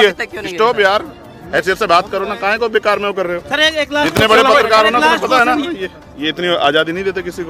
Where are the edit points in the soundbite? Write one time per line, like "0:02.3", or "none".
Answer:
0:05.6